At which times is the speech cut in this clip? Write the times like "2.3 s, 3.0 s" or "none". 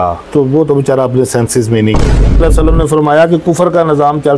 2.4 s